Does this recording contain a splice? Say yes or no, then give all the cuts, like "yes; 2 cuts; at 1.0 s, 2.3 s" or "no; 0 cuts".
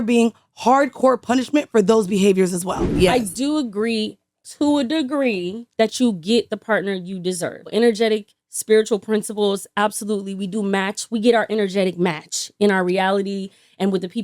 yes; 2 cuts; at 2.9 s, 7.7 s